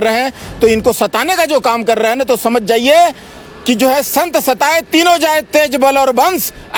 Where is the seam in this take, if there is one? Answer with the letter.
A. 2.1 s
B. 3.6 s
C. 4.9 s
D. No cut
D